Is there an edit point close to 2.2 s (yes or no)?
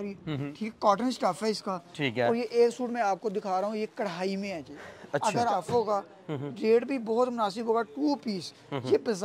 no